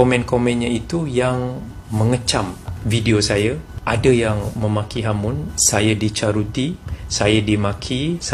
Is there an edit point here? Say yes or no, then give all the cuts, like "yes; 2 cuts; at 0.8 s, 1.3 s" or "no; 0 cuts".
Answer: no; 0 cuts